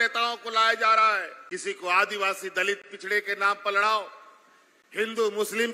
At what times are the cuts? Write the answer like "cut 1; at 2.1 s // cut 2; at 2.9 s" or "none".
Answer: cut 1; at 1.3 s